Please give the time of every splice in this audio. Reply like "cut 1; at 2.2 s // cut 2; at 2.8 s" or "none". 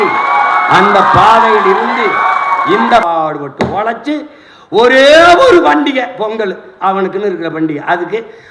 cut 1; at 3.0 s